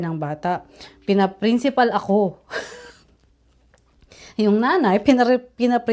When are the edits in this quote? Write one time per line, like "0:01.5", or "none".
none